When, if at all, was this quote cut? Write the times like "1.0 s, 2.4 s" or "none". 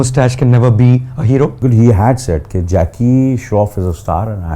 1.6 s